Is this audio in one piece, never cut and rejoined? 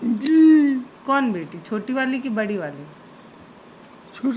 no; 1 cut; at 0.9 s

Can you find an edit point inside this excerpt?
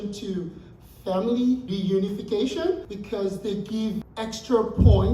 yes; 3 cuts; at 1.7 s, 2.9 s, 4.0 s

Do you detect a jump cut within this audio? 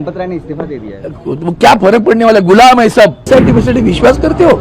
yes; 1 cut; at 3.2 s

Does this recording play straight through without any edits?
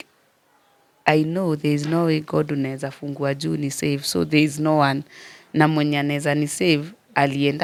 yes; 0 cuts

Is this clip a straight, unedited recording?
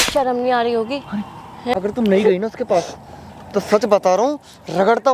no; 1 cut; at 1.7 s

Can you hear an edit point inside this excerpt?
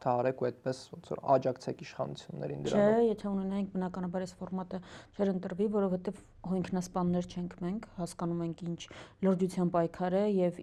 no; 0 cuts

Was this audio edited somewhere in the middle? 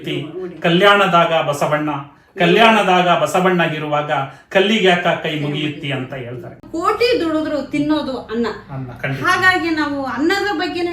yes; 1 cut; at 6.7 s

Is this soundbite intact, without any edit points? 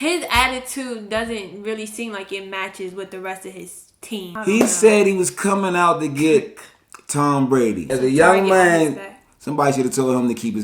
no; 2 cuts; at 4.3 s, 7.9 s

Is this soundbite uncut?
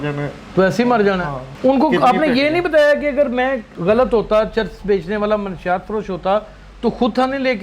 no; 2 cuts; at 1.4 s, 3.7 s

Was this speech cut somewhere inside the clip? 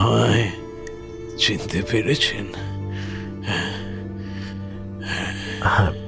yes; 1 cut; at 2.2 s

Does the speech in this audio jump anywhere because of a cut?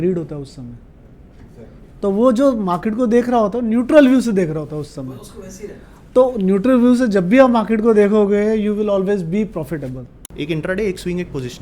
yes; 1 cut; at 10.2 s

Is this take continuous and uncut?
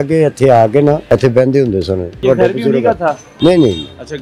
no; 2 cuts; at 1.0 s, 2.2 s

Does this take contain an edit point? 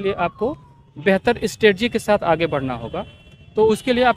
no; 0 cuts

